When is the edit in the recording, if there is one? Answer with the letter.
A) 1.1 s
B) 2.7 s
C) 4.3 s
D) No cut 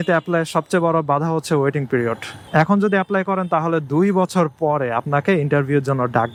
D